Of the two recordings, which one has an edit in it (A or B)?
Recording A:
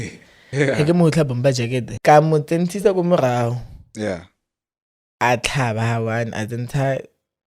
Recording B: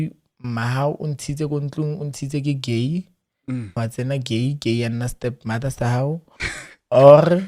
A